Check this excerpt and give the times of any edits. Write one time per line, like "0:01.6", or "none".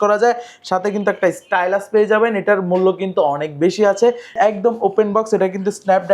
0:04.3

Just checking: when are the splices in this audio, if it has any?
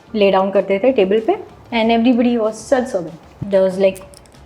0:03.3

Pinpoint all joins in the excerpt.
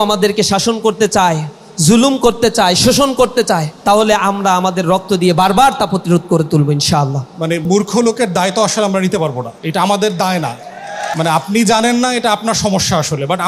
0:03.7
0:07.6
0:09.5
0:11.1

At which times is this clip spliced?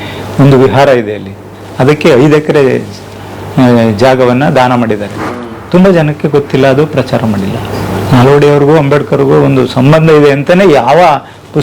0:07.7

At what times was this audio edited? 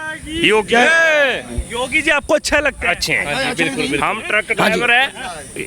none

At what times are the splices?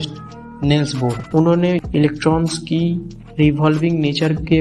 0:01.2

